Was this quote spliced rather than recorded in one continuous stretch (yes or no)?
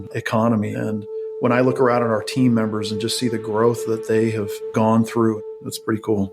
yes